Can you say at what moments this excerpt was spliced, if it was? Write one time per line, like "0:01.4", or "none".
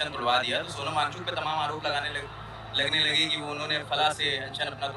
none